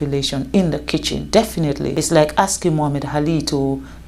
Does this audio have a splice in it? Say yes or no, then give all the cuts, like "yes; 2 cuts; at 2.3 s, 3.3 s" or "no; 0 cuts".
yes; 2 cuts; at 1.2 s, 1.9 s